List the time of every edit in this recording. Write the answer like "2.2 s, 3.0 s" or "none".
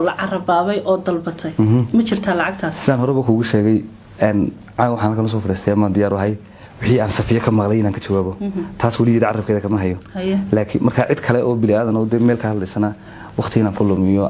none